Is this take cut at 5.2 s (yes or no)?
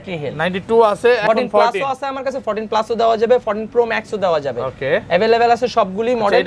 no